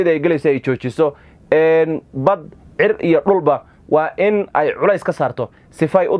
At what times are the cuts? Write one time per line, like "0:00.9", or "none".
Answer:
none